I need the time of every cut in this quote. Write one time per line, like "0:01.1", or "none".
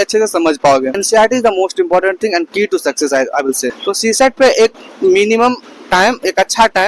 0:00.9
0:03.8